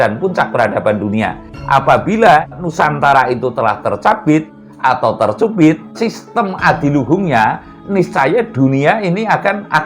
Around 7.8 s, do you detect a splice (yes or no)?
no